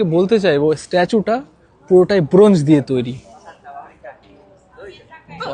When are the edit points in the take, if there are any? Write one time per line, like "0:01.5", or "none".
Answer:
none